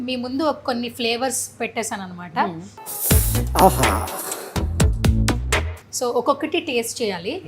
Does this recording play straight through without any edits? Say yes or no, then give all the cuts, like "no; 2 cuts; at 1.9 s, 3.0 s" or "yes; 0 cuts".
yes; 0 cuts